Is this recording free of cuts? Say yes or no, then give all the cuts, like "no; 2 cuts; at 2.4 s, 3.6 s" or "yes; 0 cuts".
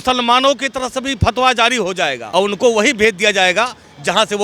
no; 1 cut; at 2.2 s